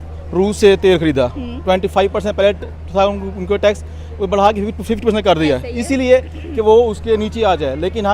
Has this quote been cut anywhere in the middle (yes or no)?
no